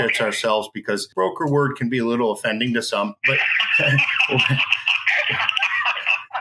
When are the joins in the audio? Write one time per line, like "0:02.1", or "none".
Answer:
0:01.1